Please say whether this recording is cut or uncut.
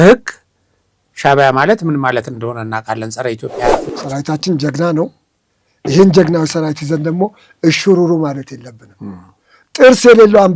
cut